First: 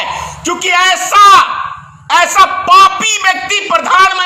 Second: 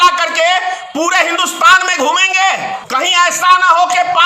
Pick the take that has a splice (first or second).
second